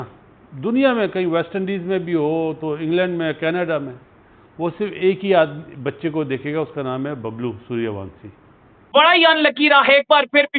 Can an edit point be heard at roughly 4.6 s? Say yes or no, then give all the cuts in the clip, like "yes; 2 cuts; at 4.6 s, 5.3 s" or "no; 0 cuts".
no; 1 cut; at 8.9 s